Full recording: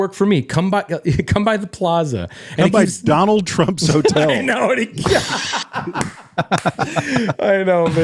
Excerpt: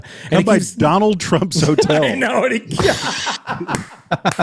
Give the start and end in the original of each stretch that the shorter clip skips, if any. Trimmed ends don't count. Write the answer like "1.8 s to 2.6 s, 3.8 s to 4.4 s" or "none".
none

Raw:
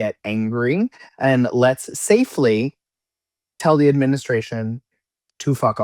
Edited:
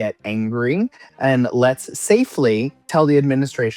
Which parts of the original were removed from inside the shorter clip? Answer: 2.8 s to 3.5 s

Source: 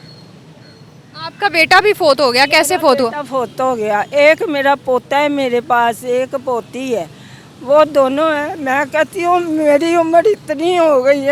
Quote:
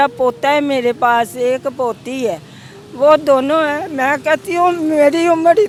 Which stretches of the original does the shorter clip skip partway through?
none

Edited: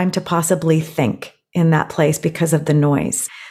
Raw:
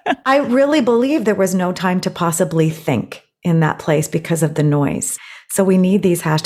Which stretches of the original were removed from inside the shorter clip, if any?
none

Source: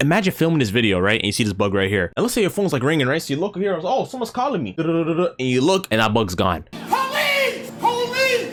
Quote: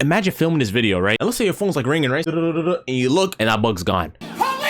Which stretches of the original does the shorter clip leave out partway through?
1.2 s to 2.1 s, 3.2 s to 4.8 s

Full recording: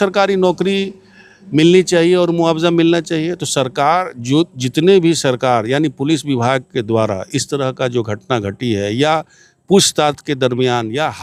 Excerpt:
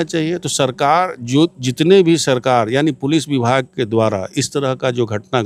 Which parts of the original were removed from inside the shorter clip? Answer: none

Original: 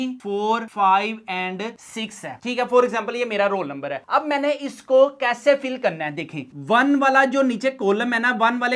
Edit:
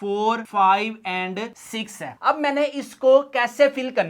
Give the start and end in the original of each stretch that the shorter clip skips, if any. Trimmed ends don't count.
2.4 s to 4.0 s

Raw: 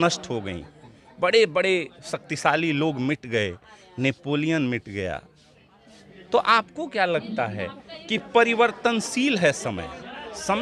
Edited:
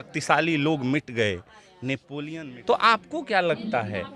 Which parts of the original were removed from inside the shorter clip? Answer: 4.3 s to 5.8 s

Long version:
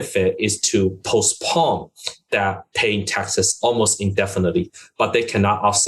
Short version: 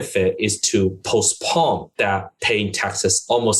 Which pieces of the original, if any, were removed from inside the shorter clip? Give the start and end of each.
1.9 s to 2.2 s

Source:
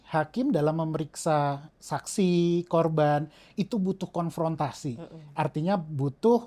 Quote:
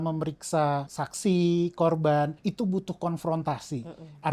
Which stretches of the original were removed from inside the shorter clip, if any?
1.7 s to 1.9 s, 3.3 s to 3.5 s

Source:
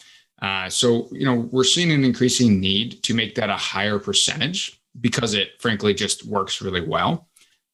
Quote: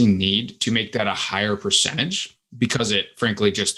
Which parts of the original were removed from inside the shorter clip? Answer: none

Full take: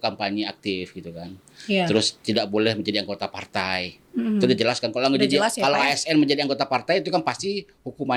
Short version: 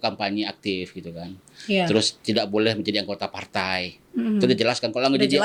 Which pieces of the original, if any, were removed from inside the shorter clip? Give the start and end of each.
none

